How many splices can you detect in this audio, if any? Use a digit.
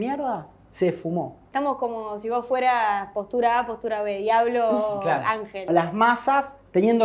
2